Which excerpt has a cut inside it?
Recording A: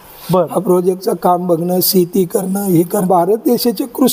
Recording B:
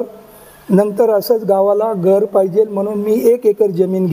A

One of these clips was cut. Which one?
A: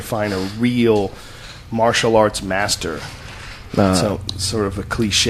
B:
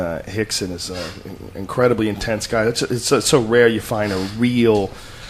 A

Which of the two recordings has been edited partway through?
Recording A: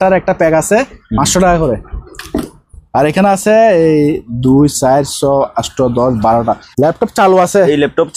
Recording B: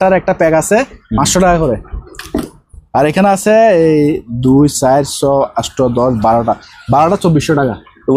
A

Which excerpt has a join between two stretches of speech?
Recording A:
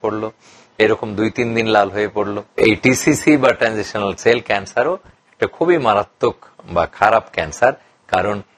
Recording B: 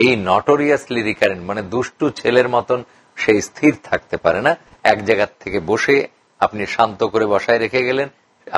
A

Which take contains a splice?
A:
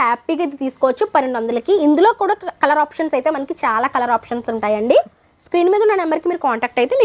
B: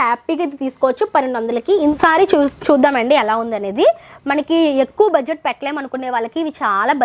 B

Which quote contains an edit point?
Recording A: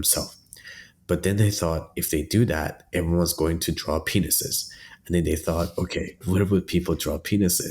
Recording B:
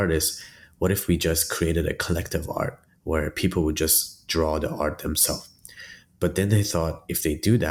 A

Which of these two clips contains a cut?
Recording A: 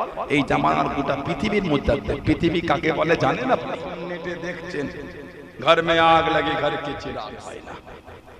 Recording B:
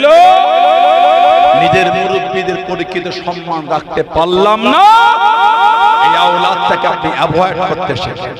A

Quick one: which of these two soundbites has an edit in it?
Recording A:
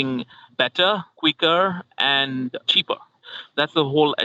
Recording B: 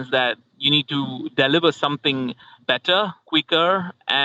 A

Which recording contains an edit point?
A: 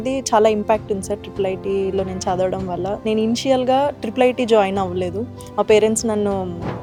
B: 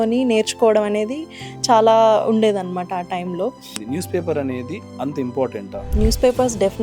B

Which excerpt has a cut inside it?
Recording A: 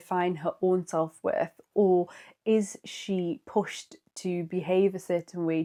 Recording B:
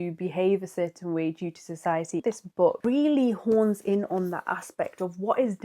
B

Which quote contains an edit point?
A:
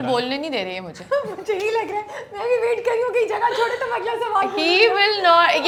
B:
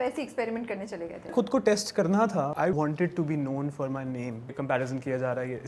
B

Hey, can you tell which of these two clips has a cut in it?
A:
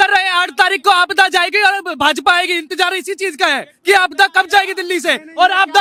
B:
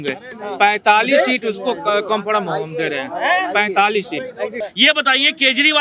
B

